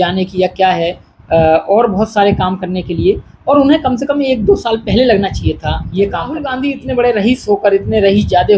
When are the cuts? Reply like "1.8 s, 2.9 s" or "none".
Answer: 6.5 s